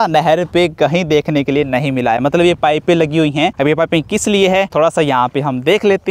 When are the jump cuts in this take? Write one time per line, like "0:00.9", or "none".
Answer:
none